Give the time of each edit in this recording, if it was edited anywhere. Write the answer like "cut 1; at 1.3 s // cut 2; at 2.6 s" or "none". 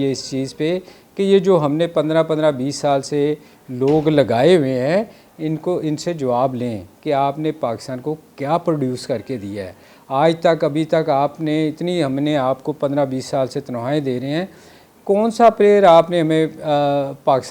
none